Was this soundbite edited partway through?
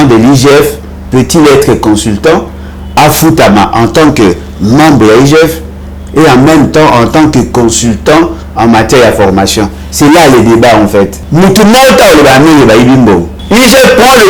yes; 2 cuts; at 11.2 s, 13.3 s

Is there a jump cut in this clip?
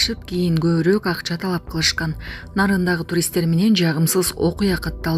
no; 0 cuts

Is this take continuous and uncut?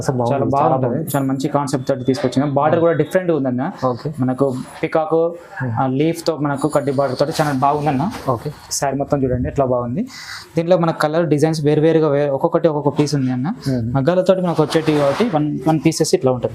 yes; 0 cuts

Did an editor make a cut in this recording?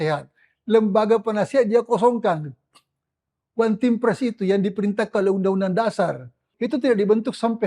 yes; 1 cut; at 6.5 s

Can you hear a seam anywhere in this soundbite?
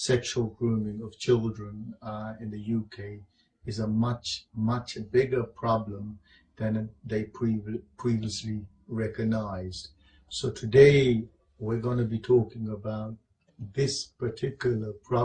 yes; 1 cut; at 6.7 s

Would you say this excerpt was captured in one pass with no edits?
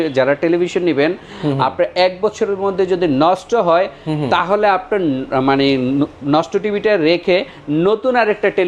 yes; 0 cuts

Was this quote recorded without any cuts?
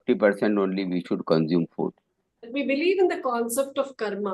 no; 1 cut; at 2.5 s

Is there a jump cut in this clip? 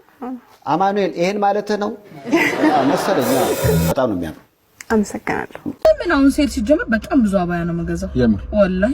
yes; 1 cut; at 3.9 s

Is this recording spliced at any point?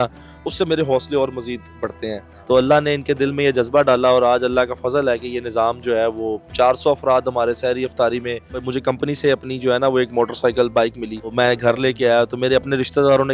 yes; 3 cuts; at 2.3 s, 8.7 s, 11.3 s

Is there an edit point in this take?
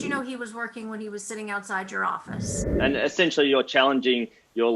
yes; 1 cut; at 2.6 s

